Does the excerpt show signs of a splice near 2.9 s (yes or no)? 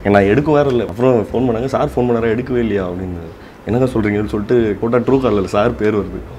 no